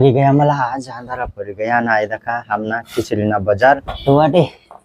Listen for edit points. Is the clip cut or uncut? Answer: cut